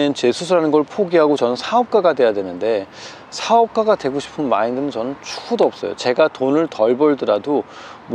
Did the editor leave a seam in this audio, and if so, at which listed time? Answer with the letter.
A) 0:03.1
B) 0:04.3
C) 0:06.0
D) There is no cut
D